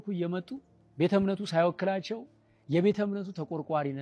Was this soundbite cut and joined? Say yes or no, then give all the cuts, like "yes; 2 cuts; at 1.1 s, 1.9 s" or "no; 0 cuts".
no; 0 cuts